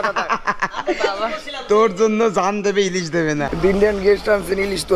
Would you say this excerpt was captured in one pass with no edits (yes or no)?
no